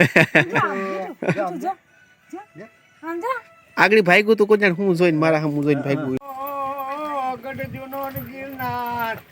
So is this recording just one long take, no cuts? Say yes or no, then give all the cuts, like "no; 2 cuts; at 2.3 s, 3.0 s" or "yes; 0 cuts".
no; 1 cut; at 6.2 s